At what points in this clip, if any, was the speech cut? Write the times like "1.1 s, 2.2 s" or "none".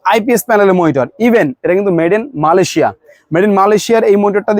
none